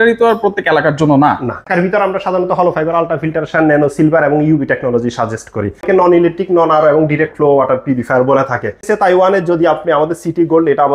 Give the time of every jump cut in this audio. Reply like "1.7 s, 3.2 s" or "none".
1.6 s, 5.8 s, 8.8 s